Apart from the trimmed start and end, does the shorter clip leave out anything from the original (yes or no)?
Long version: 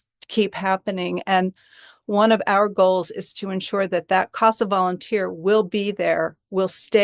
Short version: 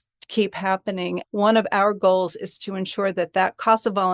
yes